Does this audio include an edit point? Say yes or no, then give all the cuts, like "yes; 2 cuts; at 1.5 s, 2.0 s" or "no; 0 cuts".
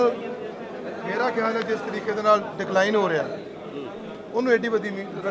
no; 0 cuts